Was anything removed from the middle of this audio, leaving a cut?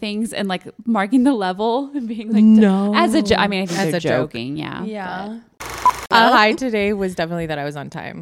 yes; 1 cut; at 6.1 s

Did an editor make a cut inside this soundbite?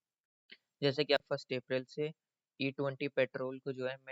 yes; 1 cut; at 1.2 s

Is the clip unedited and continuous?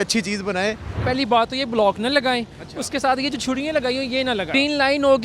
no; 2 cuts; at 1.0 s, 4.5 s

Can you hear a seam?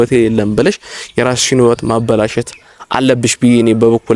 no; 0 cuts

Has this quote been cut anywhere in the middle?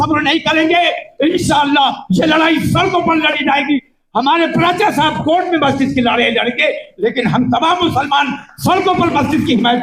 no; 0 cuts

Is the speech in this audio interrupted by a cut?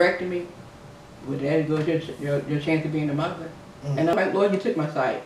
yes; 1 cut; at 4.1 s

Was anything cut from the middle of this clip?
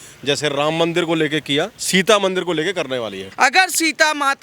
yes; 2 cuts; at 1.8 s, 3.2 s

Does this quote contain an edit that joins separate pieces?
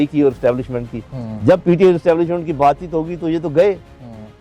no; 0 cuts

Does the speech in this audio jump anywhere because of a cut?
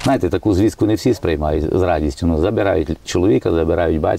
no; 0 cuts

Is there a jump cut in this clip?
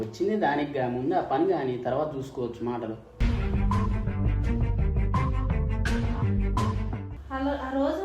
yes; 2 cuts; at 3.2 s, 7.3 s

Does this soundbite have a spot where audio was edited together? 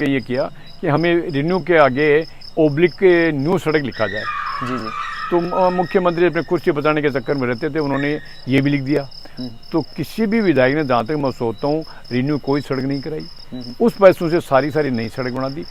no; 0 cuts

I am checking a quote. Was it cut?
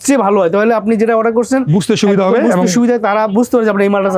no; 0 cuts

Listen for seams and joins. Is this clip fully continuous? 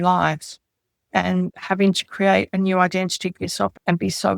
no; 1 cut; at 1.5 s

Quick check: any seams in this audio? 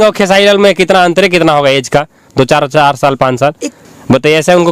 yes; 1 cut; at 3.7 s

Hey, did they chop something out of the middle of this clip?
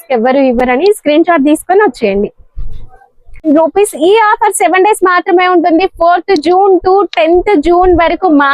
yes; 1 cut; at 3.4 s

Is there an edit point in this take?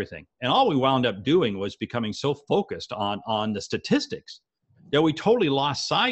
no; 0 cuts

